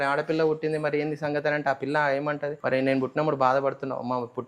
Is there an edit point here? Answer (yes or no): yes